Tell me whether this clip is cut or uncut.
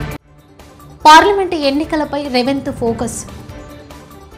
uncut